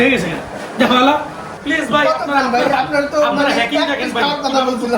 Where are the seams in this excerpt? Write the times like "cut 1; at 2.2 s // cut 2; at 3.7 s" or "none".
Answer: cut 1; at 1.5 s